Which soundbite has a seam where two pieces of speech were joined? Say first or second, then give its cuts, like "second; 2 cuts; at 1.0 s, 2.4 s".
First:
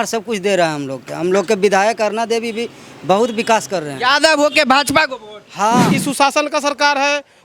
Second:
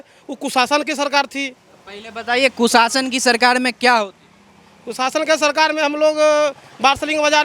first; 1 cut; at 5.9 s